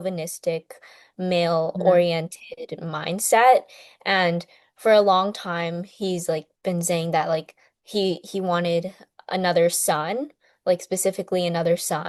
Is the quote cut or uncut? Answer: uncut